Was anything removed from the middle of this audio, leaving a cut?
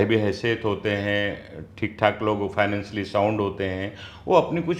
no; 0 cuts

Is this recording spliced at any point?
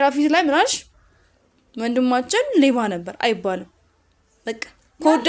no; 0 cuts

